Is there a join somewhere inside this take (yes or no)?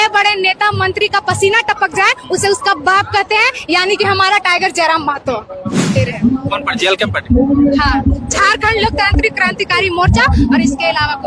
yes